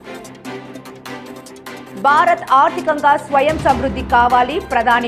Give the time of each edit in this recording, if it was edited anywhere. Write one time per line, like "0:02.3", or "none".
0:01.9